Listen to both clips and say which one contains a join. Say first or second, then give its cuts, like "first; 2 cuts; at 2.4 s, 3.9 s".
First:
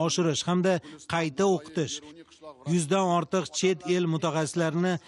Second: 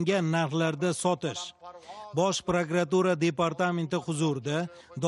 first; 1 cut; at 1.7 s